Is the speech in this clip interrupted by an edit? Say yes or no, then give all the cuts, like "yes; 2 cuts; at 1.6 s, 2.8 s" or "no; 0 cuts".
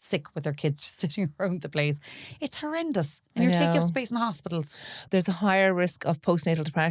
yes; 1 cut; at 5.0 s